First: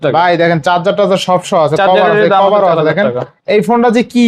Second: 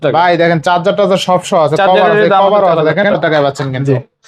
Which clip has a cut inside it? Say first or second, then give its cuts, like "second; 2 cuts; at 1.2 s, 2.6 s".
second; 1 cut; at 3.2 s